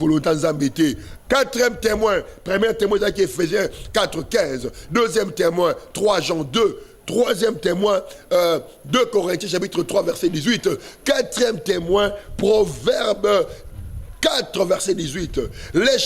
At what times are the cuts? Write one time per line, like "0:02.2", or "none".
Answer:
none